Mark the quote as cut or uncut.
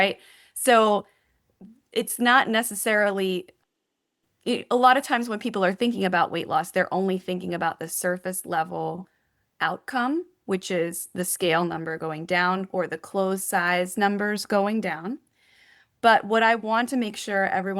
uncut